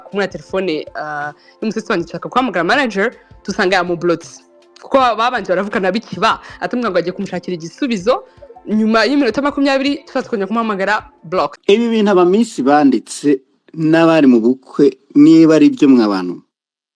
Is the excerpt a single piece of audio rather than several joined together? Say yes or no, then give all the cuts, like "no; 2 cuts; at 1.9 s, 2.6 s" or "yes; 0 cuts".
no; 1 cut; at 11.6 s